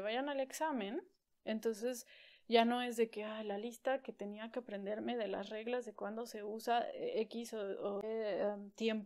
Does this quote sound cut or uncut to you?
cut